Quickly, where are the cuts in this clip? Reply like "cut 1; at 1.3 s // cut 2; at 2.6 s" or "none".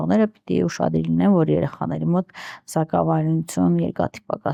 none